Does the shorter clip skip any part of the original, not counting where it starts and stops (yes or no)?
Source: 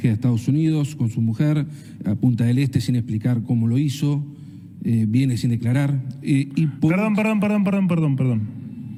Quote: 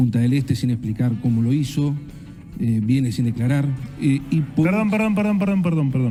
no